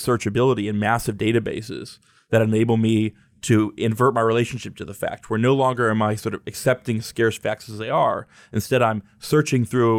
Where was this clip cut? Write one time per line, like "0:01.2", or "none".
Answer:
none